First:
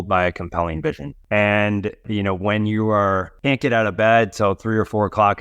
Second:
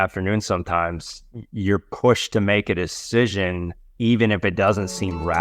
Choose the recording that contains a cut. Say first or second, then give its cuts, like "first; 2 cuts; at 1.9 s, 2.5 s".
first; 3 cuts; at 1.1 s, 2.0 s, 3.3 s